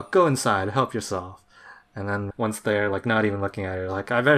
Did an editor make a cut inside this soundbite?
yes; 1 cut; at 2.2 s

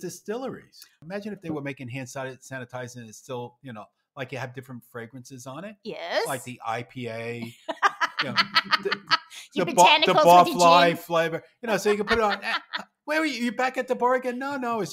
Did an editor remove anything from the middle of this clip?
yes; 1 cut; at 0.9 s

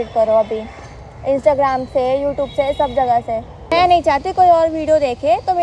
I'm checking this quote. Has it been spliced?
yes; 1 cut; at 3.7 s

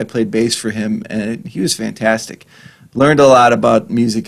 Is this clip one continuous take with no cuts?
yes; 0 cuts

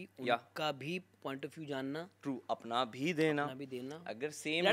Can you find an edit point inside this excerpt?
no; 0 cuts

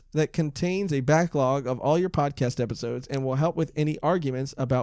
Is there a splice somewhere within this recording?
no; 0 cuts

